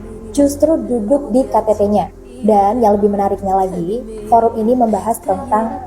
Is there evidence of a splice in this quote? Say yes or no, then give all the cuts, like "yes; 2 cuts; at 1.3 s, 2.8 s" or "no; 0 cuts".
no; 0 cuts